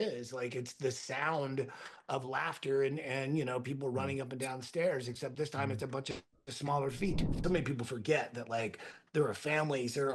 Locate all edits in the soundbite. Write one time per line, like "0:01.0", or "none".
0:07.4